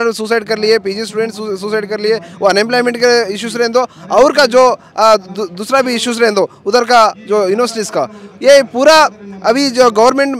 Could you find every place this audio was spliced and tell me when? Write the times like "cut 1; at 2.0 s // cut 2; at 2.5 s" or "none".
none